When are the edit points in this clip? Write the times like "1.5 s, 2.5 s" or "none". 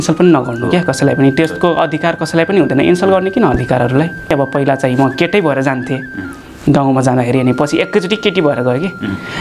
4.3 s